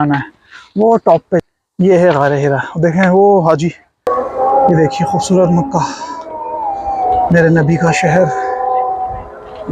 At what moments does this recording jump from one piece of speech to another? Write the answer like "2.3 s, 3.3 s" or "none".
4.1 s